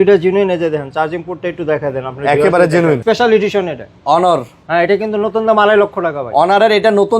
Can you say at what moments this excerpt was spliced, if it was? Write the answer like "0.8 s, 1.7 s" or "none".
3.0 s